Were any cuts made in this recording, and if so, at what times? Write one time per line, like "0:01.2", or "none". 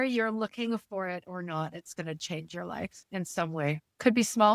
none